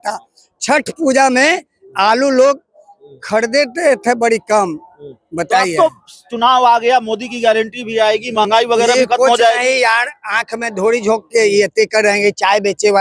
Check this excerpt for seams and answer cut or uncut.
uncut